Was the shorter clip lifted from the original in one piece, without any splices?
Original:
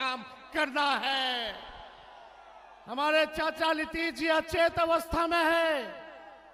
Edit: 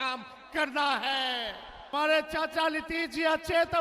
no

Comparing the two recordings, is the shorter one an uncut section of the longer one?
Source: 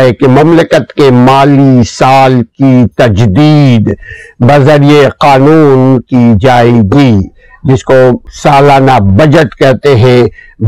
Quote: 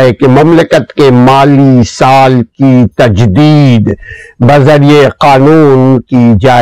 yes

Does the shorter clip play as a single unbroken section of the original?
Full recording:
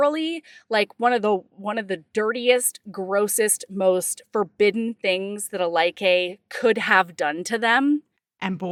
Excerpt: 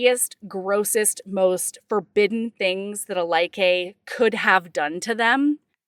yes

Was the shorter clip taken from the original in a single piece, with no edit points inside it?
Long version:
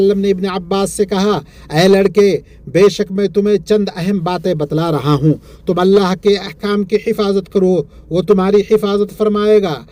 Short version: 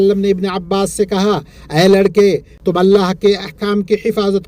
no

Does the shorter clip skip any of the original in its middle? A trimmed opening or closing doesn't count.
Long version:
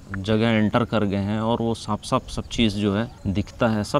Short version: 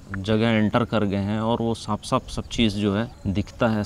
no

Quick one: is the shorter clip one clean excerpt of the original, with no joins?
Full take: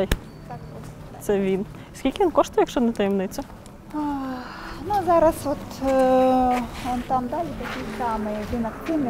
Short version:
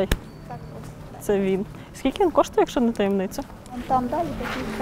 no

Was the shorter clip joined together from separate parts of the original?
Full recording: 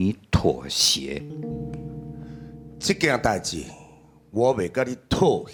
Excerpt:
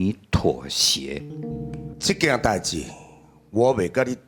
yes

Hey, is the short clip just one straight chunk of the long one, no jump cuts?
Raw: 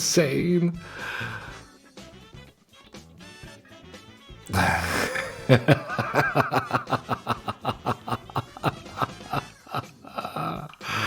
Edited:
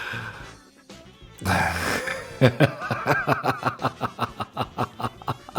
no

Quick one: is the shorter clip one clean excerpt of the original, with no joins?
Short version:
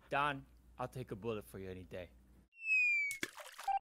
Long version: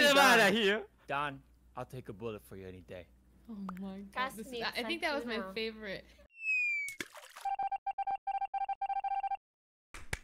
no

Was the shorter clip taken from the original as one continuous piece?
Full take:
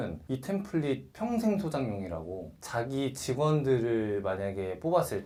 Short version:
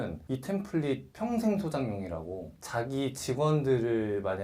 yes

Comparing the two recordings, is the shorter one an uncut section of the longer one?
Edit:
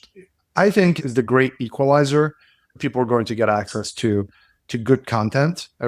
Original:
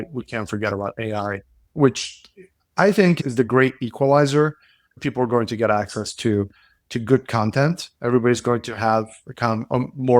yes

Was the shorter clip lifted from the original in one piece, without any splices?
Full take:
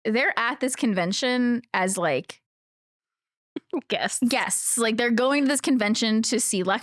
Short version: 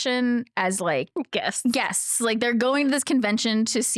no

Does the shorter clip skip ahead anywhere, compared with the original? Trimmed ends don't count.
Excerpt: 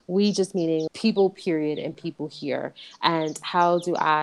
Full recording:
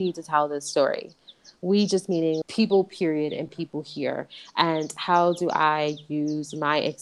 no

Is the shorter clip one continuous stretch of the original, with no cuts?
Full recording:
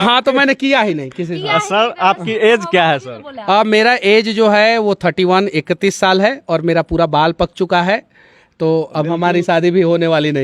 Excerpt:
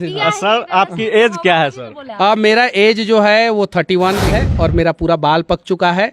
no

